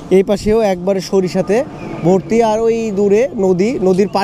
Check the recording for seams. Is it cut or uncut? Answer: uncut